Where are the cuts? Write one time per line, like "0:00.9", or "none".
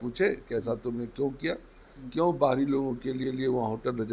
none